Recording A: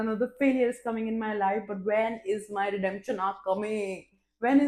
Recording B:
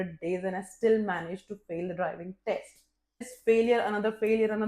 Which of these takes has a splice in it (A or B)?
B